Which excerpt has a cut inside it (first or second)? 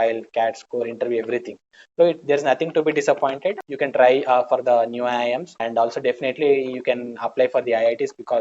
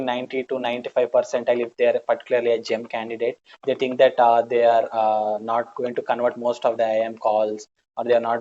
first